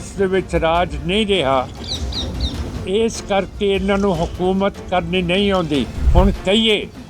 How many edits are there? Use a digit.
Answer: 1